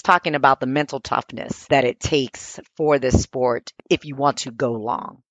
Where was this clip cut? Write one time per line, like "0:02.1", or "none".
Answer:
0:01.6